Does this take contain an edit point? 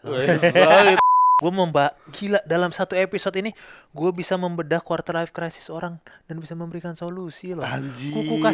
yes; 1 cut; at 1.0 s

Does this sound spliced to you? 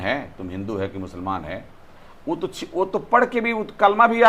no; 0 cuts

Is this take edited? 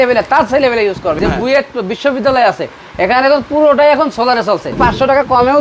yes; 2 cuts; at 1.2 s, 4.8 s

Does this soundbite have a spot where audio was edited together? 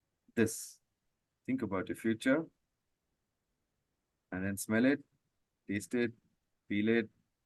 no; 0 cuts

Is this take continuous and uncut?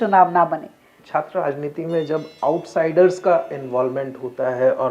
no; 1 cut; at 0.9 s

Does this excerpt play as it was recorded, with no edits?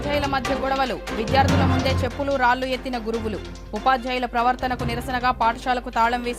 yes; 0 cuts

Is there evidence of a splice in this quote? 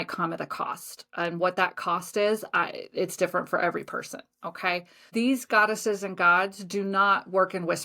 yes; 1 cut; at 5.1 s

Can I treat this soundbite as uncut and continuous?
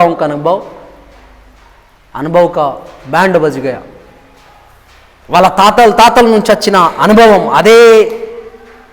yes; 0 cuts

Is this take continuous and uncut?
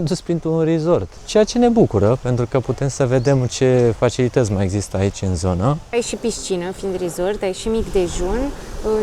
no; 2 cuts; at 1.2 s, 5.9 s

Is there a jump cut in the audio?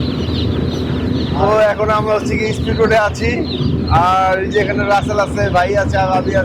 no; 0 cuts

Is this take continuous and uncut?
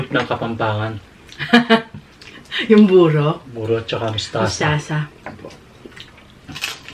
yes; 0 cuts

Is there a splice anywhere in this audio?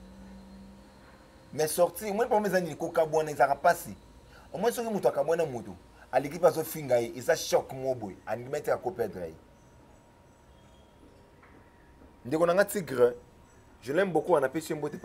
no; 0 cuts

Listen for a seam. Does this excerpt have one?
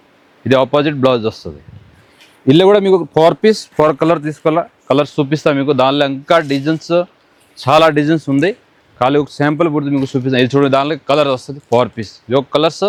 no; 0 cuts

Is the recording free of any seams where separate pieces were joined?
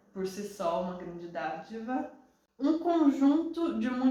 yes; 0 cuts

